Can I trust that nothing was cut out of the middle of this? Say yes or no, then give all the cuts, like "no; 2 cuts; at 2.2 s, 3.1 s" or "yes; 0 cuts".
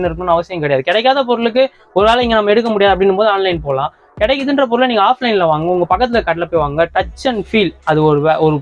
yes; 0 cuts